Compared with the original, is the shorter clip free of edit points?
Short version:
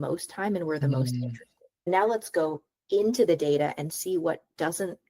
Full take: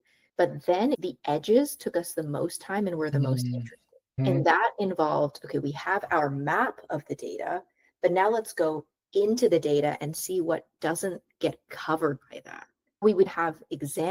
no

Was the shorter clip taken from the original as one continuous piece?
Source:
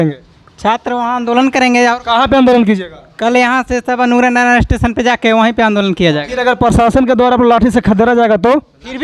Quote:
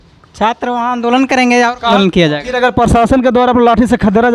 no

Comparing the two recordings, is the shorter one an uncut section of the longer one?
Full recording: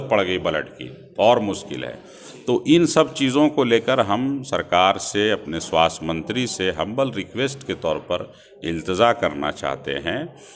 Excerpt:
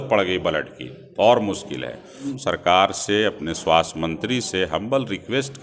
no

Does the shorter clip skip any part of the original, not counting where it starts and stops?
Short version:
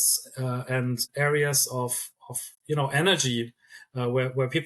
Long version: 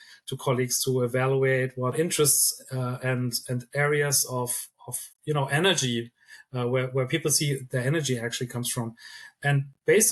yes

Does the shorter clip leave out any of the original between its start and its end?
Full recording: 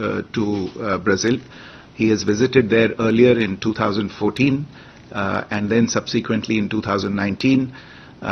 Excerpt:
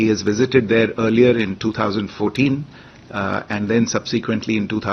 no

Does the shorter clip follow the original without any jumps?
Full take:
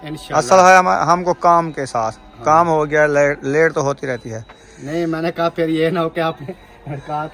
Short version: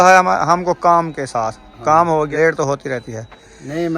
no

